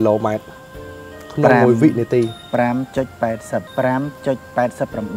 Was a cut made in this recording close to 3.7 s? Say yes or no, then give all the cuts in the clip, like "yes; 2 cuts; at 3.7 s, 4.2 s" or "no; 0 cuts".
yes; 1 cut; at 3.7 s